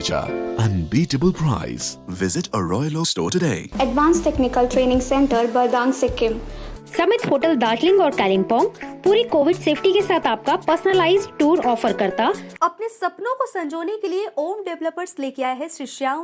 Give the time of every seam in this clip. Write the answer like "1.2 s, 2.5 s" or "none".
3.6 s, 6.6 s, 12.5 s